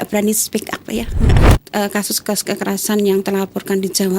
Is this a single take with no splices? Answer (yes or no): no